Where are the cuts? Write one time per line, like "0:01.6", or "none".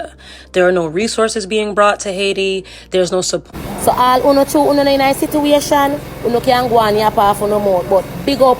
0:03.4